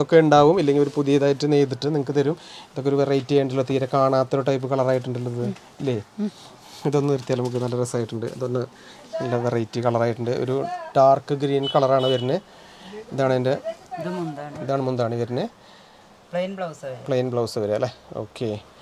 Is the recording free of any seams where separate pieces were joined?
yes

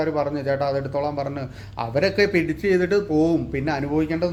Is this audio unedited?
yes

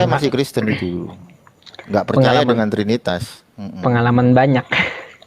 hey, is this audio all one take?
yes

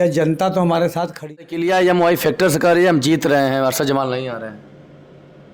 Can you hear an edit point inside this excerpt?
yes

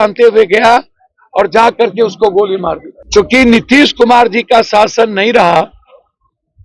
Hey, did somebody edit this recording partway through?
yes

